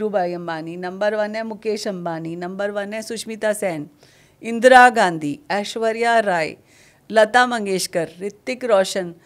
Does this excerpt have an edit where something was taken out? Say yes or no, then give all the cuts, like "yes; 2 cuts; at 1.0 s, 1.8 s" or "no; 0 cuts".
no; 0 cuts